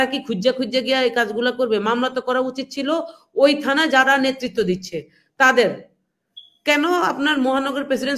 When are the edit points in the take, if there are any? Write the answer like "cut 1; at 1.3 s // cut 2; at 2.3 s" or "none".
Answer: none